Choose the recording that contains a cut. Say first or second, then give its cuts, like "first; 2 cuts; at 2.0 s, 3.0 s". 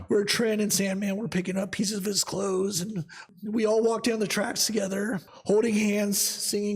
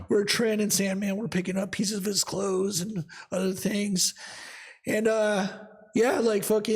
first; 2 cuts; at 3.2 s, 5.3 s